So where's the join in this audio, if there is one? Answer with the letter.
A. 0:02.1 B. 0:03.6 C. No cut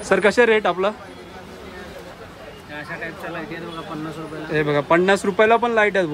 A